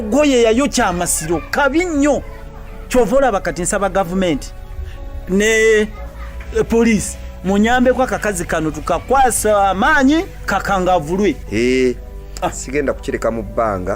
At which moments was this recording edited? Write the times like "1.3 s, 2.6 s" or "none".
none